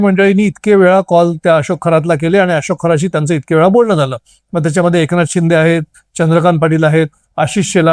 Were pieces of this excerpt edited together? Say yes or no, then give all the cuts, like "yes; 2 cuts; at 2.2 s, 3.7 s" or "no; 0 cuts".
no; 0 cuts